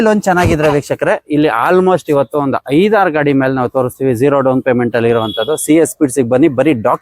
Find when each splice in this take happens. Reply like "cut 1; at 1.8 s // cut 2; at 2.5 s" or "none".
none